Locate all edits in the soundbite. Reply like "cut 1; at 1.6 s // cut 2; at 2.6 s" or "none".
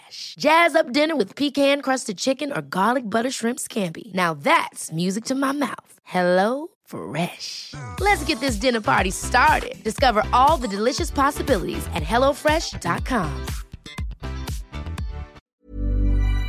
cut 1; at 15.4 s